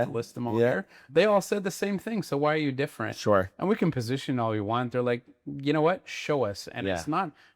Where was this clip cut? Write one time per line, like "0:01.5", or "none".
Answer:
0:01.0